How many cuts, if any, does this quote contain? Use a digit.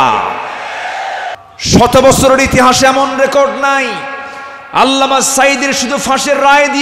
1